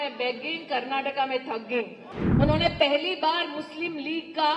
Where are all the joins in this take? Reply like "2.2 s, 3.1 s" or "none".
2.0 s